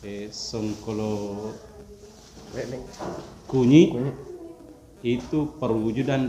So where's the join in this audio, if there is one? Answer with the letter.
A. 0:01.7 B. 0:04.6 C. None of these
C